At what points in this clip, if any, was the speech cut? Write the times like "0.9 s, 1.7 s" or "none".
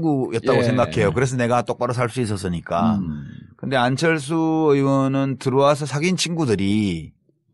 5.6 s